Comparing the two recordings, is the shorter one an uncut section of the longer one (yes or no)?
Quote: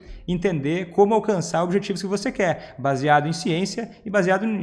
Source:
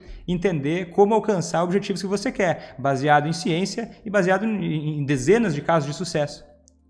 yes